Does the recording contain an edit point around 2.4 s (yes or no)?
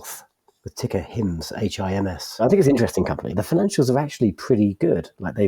yes